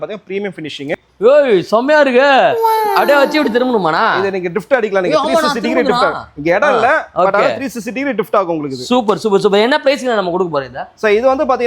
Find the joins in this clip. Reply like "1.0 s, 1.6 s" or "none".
0.9 s